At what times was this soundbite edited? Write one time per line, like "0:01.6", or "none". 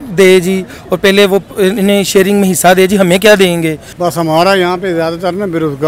0:03.9